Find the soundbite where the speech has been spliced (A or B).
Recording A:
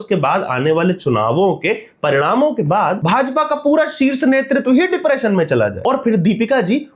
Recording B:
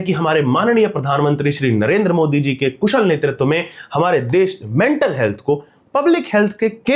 A